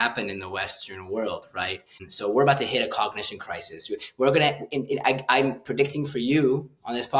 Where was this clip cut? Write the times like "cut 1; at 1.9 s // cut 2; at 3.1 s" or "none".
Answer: cut 1; at 2.0 s